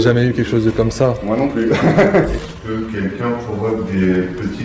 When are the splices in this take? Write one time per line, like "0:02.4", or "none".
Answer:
0:02.3